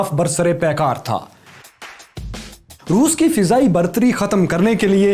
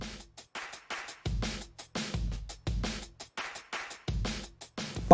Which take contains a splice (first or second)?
second